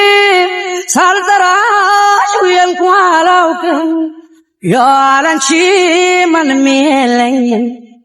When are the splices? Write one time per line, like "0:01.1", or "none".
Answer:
none